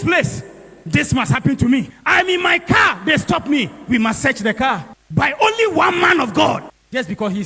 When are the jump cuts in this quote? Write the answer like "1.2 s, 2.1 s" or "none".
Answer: 2.0 s